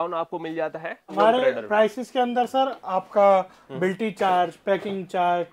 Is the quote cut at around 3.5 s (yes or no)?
no